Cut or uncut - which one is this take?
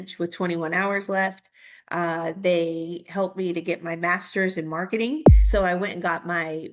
cut